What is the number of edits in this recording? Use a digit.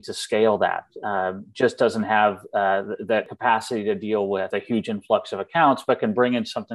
2